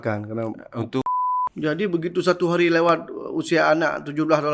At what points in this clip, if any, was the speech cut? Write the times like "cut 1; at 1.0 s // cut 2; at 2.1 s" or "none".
cut 1; at 1.1 s